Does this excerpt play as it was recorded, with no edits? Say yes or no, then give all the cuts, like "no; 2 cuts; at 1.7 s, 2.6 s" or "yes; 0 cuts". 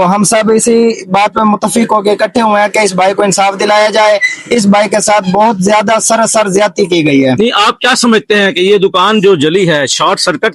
yes; 0 cuts